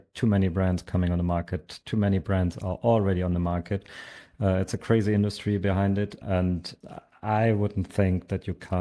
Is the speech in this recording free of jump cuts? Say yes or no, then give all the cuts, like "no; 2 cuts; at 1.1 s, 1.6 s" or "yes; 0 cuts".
yes; 0 cuts